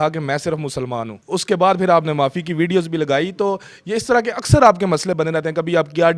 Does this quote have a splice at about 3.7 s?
no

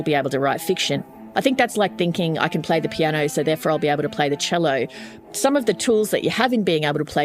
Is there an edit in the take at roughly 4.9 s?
no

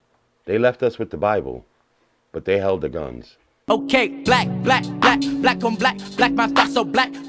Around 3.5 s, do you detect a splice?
yes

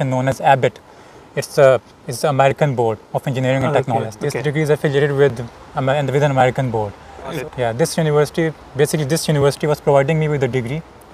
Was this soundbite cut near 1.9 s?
no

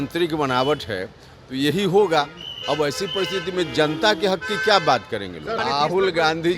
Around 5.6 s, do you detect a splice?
yes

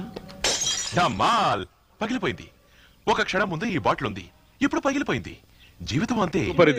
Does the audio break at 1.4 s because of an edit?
no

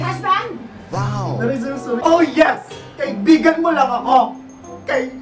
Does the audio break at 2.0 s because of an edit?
yes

